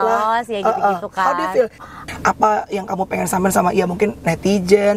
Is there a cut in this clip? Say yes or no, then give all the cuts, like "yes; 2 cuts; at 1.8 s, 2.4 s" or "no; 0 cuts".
yes; 1 cut; at 1.9 s